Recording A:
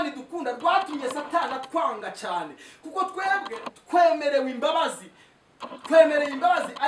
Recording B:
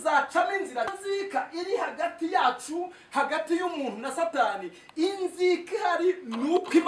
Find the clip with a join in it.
B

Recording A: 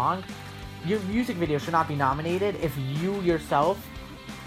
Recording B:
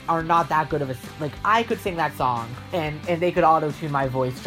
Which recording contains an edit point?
B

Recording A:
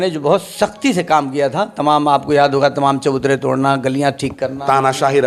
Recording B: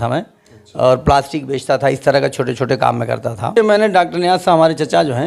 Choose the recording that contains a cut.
B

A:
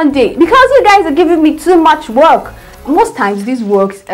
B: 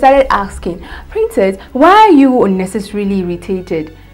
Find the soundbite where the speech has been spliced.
A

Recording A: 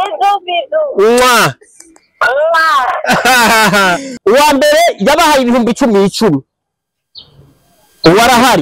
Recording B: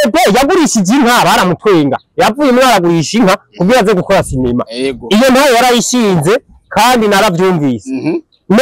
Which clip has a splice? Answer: A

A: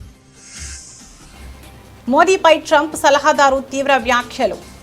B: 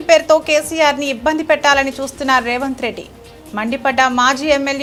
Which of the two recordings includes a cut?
A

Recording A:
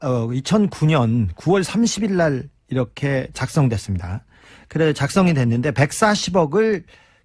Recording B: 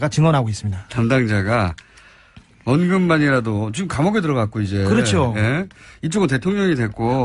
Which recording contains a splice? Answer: B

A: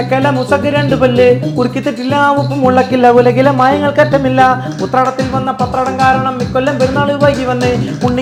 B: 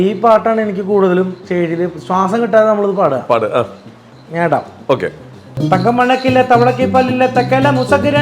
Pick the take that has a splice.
B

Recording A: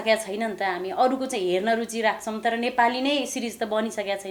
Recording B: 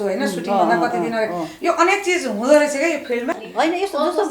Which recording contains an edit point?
B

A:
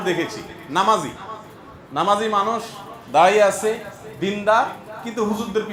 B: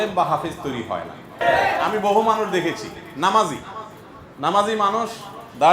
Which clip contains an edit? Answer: B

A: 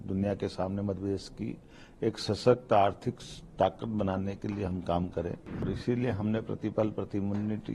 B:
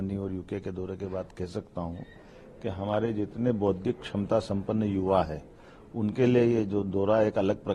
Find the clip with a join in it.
A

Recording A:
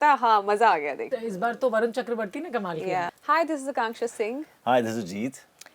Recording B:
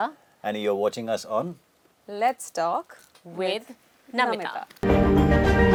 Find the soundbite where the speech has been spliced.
A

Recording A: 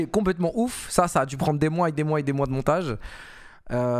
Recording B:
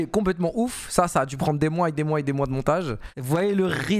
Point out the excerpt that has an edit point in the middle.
B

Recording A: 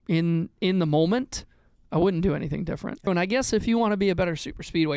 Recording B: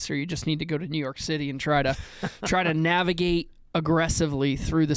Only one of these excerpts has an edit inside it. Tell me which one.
A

